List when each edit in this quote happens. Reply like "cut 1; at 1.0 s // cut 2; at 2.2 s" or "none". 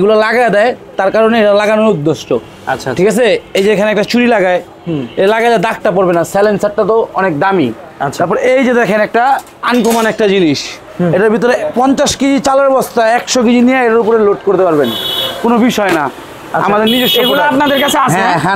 none